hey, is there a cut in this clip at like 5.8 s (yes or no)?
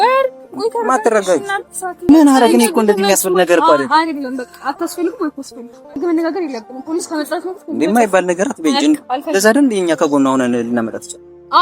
yes